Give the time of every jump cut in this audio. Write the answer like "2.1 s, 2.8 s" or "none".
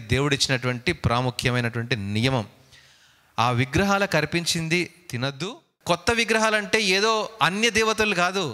5.6 s